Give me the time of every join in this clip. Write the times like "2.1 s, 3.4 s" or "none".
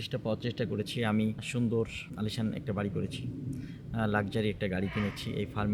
1.4 s, 2.1 s